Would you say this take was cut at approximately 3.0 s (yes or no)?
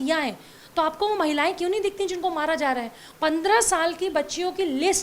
yes